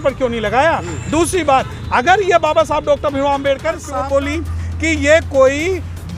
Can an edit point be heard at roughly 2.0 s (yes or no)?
no